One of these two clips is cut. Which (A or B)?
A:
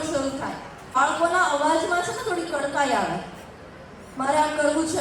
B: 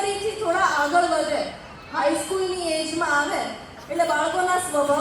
A